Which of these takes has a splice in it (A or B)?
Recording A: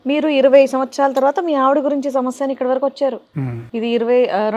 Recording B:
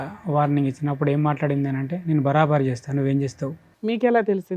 B